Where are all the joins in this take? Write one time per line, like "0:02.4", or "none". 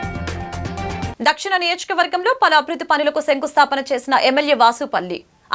0:01.1

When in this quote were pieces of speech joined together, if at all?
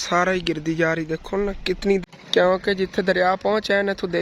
0:02.0

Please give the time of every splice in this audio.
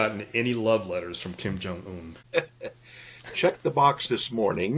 0:02.2

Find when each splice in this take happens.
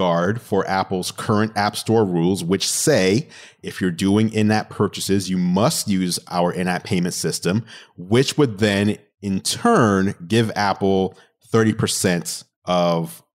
none

